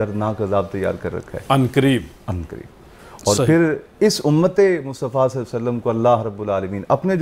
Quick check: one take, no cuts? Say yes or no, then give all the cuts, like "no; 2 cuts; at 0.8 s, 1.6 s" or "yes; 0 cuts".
yes; 0 cuts